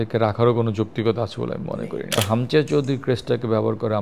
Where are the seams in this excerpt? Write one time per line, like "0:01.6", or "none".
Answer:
0:02.2